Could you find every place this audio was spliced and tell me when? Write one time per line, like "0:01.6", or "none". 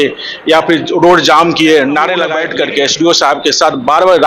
0:02.4